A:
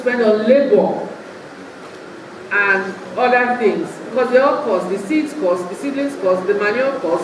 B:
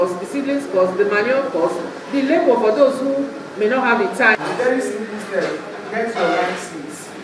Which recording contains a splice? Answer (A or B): B